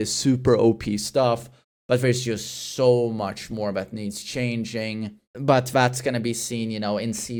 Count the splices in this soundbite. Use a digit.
0